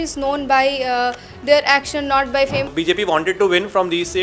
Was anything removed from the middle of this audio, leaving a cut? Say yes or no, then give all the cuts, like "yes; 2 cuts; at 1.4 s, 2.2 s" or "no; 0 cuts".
yes; 1 cut; at 2.7 s